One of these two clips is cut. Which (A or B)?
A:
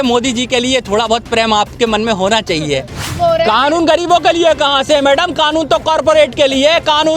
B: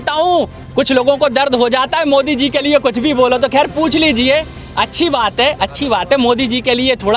A